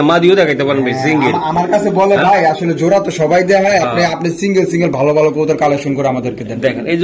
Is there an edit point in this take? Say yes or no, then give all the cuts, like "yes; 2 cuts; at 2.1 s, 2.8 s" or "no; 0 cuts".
no; 0 cuts